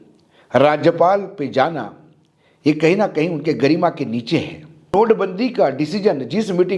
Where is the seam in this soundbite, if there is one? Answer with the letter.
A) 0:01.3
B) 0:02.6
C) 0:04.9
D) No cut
C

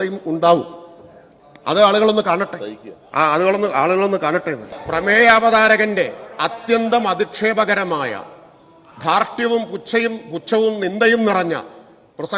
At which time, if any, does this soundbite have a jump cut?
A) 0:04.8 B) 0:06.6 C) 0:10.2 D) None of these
A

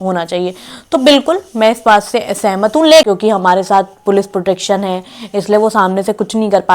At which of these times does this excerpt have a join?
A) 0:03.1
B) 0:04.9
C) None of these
A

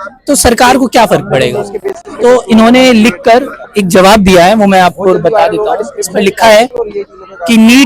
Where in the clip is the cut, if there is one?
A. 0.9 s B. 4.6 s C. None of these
C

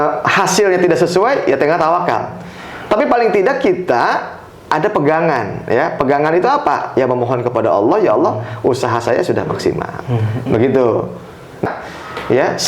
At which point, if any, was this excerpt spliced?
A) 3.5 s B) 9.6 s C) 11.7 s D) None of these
C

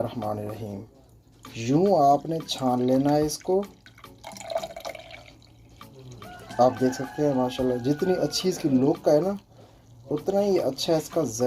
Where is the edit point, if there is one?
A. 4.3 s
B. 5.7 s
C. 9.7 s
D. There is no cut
D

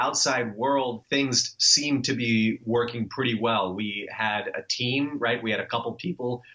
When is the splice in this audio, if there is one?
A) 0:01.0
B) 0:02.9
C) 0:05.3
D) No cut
A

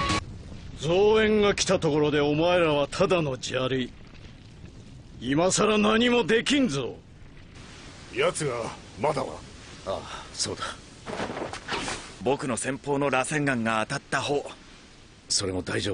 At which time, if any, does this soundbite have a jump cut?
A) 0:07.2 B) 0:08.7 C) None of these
B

